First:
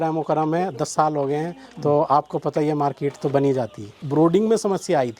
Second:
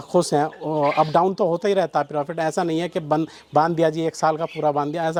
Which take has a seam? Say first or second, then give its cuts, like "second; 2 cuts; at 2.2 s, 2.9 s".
first; 1 cut; at 4.0 s